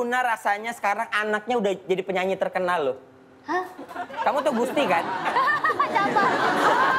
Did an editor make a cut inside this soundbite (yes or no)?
no